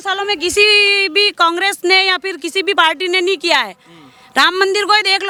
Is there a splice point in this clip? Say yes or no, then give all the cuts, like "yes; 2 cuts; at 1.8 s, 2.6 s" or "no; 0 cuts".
no; 0 cuts